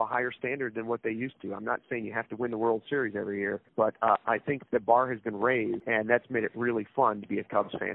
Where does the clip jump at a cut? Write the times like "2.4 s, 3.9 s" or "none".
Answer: 3.6 s, 5.8 s